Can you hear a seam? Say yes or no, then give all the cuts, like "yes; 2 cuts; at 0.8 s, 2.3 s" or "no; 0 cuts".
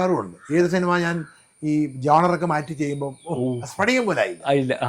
no; 0 cuts